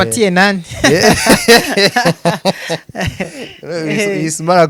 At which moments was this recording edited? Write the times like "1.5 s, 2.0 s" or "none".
none